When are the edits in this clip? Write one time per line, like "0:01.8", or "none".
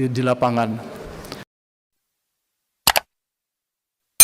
0:01.4